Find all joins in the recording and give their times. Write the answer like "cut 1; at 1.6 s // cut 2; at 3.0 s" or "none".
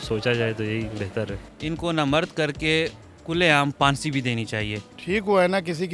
cut 1; at 1.5 s // cut 2; at 4.9 s